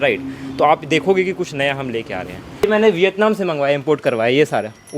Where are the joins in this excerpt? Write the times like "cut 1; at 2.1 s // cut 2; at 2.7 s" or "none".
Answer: cut 1; at 2.6 s